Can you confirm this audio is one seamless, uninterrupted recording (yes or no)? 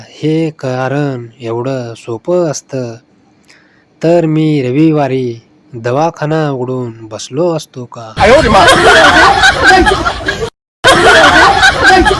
no